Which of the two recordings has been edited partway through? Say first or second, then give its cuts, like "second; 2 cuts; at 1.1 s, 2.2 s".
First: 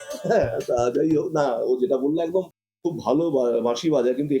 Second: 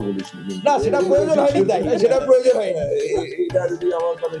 first; 1 cut; at 2.6 s